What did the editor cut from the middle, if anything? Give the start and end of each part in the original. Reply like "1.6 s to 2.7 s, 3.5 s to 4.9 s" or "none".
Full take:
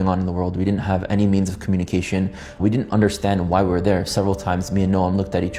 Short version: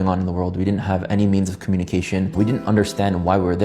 2.3 s to 2.6 s